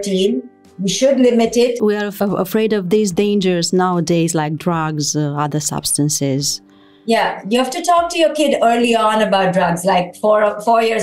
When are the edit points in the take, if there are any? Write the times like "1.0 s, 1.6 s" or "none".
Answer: 1.9 s